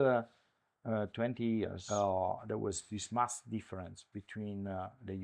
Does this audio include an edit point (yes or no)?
yes